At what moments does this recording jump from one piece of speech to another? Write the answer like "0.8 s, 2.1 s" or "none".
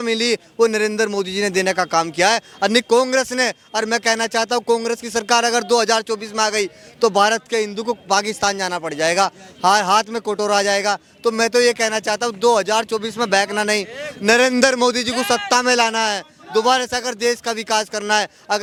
none

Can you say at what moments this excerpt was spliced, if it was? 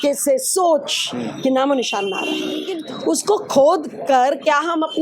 2.8 s

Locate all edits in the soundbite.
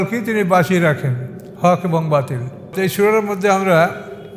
2.7 s

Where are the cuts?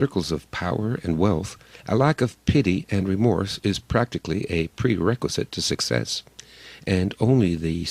3.9 s

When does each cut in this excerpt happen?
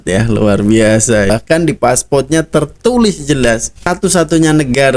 1.3 s, 3.8 s

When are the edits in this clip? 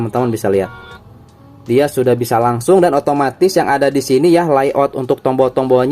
none

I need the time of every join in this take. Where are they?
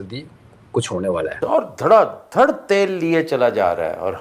1.4 s

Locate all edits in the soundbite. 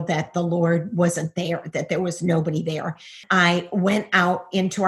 3.2 s

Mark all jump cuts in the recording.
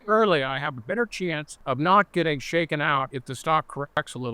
1.5 s, 3.2 s

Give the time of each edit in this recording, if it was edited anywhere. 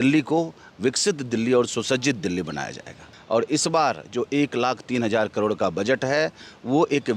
3.1 s

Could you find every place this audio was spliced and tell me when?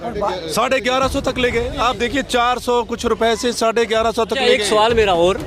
4.4 s

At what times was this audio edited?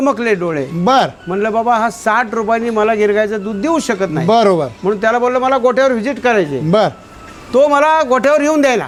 none

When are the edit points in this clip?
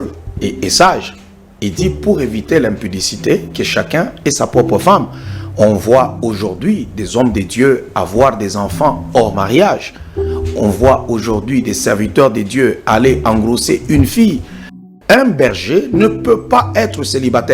14.8 s

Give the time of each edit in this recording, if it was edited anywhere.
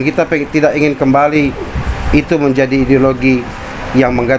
none

